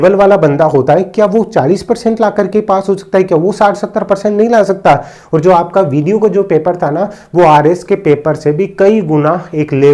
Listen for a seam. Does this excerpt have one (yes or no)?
no